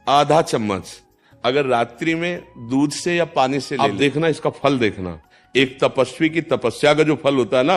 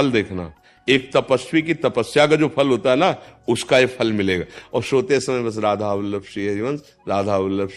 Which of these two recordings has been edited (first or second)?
first